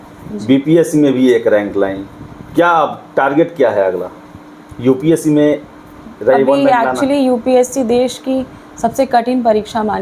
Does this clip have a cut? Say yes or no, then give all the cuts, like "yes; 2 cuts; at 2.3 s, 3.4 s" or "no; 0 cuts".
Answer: no; 0 cuts